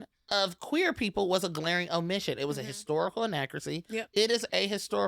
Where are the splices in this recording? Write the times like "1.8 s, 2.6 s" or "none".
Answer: none